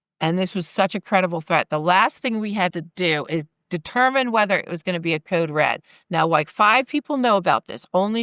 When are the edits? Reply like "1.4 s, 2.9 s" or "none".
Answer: 2.7 s